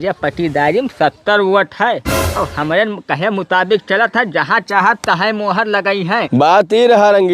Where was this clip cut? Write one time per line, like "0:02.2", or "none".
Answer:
0:06.2